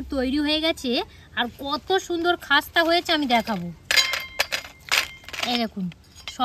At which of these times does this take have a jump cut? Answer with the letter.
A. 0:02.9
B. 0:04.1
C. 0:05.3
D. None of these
D